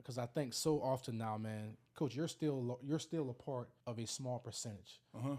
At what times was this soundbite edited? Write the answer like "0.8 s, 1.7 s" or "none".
3.7 s